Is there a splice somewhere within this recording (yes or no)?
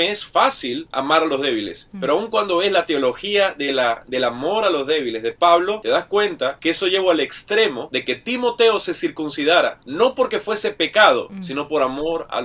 yes